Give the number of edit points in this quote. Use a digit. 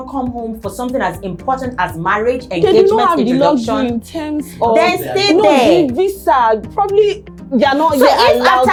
0